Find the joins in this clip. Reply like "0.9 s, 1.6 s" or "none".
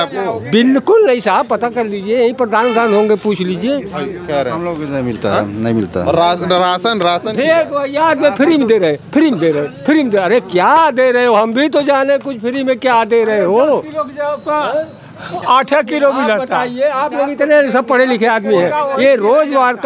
none